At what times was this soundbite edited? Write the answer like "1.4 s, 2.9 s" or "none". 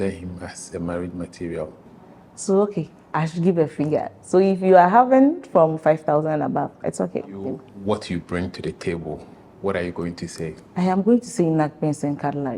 1.9 s, 7.5 s